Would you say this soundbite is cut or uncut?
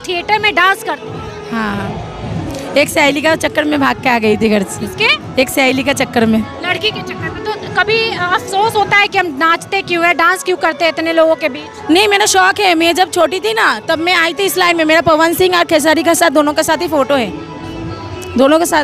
uncut